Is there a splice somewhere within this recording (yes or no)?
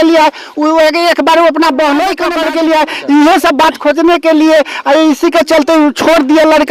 yes